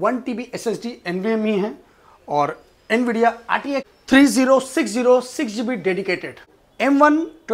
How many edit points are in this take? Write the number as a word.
two